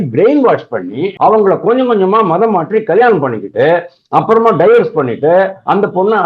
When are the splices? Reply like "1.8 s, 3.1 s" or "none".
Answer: 1.0 s